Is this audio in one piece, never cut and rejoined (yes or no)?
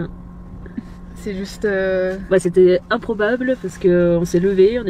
yes